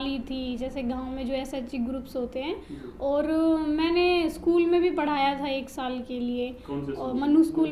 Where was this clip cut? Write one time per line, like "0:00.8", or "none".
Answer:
none